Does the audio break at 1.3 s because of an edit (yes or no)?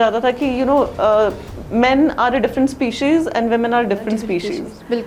no